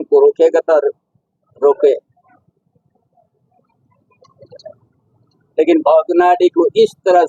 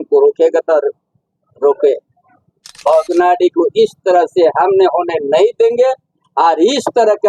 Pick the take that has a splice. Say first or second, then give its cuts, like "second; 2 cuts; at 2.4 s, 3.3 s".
second; 1 cut; at 2.8 s